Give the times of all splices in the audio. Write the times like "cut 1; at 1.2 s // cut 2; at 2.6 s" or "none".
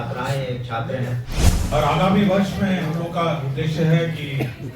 cut 1; at 1.6 s